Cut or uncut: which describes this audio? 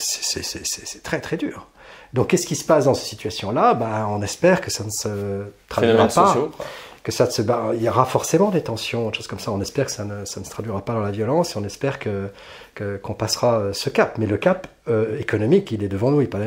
uncut